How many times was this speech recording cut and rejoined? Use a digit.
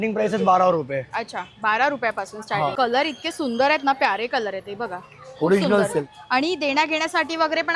2